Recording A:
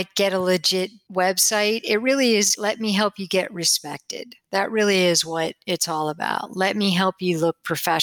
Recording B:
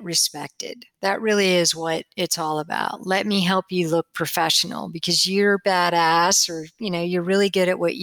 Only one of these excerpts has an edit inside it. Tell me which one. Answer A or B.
A